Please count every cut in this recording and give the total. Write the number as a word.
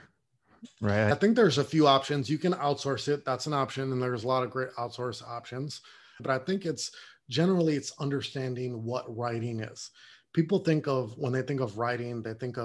two